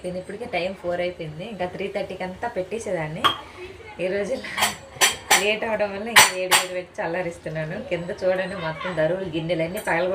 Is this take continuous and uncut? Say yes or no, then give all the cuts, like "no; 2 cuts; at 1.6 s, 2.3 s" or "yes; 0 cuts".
yes; 0 cuts